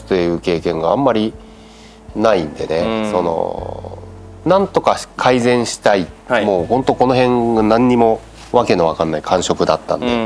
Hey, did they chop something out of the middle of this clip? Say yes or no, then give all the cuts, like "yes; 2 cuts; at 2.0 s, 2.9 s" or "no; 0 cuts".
no; 0 cuts